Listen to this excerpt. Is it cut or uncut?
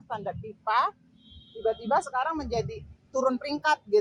uncut